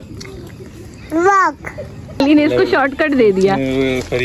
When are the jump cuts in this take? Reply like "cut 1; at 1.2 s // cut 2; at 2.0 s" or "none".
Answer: cut 1; at 2.2 s